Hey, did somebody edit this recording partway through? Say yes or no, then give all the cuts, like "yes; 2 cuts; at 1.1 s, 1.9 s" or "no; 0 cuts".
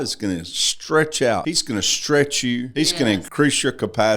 yes; 2 cuts; at 1.5 s, 3.1 s